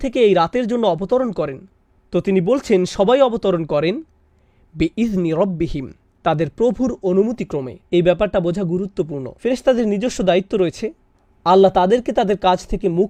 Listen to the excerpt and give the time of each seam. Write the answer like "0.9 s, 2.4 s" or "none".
none